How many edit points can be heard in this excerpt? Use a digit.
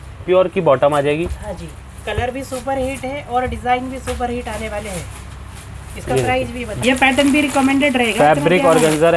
2